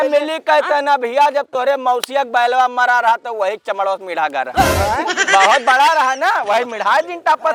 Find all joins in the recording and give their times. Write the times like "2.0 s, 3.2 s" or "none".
none